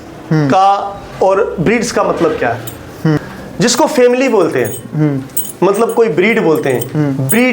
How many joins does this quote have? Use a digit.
1